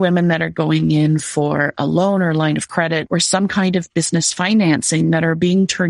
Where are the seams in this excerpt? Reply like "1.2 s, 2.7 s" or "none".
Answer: 3.0 s